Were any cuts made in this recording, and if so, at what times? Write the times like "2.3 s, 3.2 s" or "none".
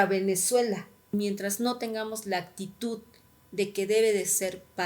1.0 s